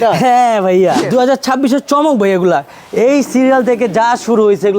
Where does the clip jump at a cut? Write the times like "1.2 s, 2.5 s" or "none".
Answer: 1.0 s